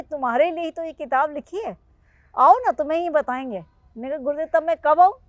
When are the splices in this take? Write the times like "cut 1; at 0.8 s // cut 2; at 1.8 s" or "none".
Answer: none